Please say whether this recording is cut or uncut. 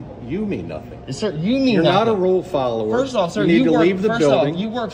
uncut